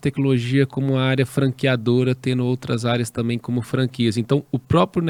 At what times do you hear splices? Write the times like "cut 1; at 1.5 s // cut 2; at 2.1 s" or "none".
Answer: none